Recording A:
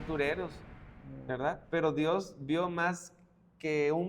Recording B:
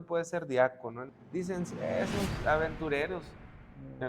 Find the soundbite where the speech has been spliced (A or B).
B